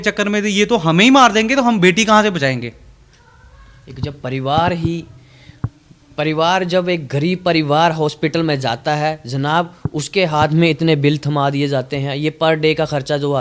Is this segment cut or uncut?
uncut